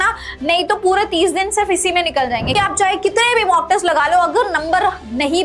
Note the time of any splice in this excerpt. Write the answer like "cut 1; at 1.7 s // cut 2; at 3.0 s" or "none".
cut 1; at 2.6 s

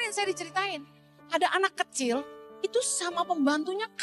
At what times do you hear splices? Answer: cut 1; at 1.1 s // cut 2; at 2.4 s

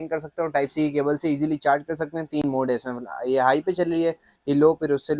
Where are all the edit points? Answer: none

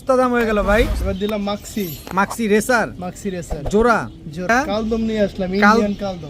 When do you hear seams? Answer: cut 1; at 1.0 s // cut 2; at 4.5 s

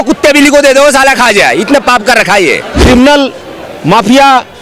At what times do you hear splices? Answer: cut 1; at 2.8 s

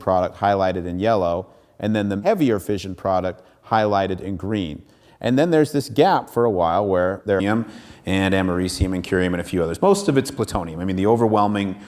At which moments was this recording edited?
none

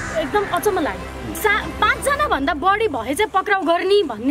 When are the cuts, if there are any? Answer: cut 1; at 1.3 s

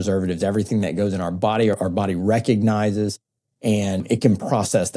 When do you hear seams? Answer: cut 1; at 1.8 s // cut 2; at 4.0 s

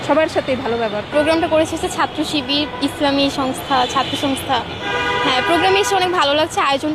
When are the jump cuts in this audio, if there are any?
cut 1; at 1.1 s

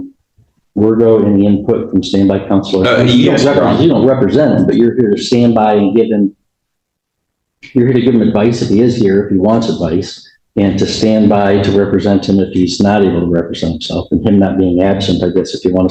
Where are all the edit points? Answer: none

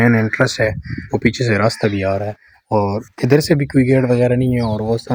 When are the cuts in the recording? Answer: none

